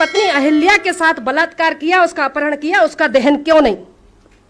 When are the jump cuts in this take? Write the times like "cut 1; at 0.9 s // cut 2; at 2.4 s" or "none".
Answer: none